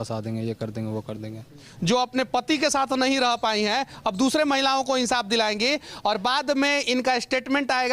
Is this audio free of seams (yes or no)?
no